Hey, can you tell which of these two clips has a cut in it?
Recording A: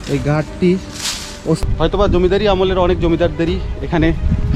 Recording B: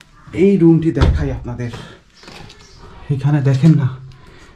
A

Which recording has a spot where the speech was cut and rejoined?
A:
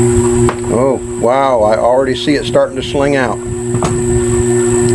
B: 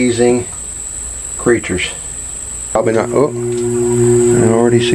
B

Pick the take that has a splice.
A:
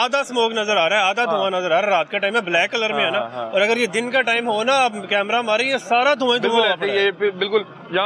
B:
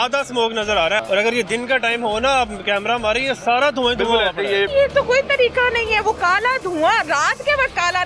B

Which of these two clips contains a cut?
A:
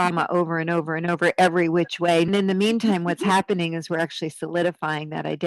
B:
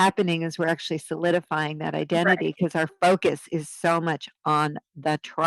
A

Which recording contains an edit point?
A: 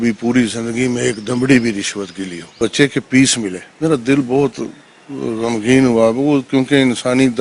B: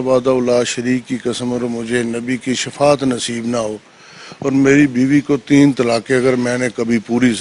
A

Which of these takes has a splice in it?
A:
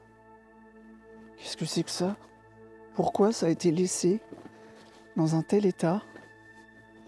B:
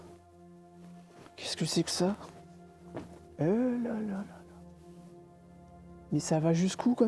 A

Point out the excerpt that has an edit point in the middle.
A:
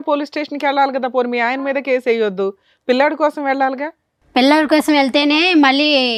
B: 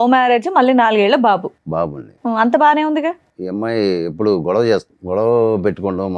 B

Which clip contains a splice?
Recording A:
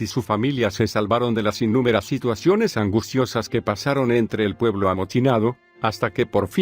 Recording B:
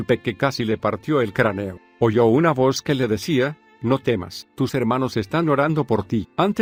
A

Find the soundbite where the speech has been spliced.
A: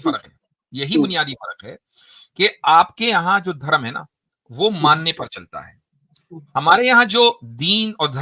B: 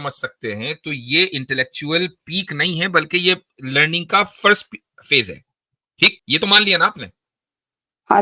B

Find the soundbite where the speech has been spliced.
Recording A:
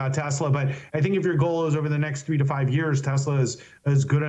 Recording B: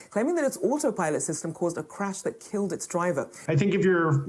B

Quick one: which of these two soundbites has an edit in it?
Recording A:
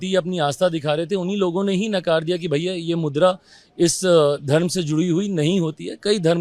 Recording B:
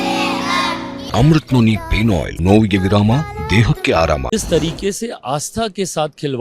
B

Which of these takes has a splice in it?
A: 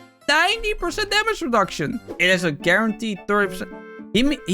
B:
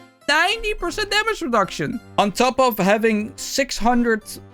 A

